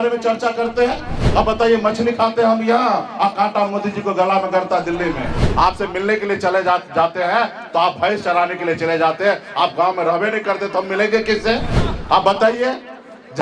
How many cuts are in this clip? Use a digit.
1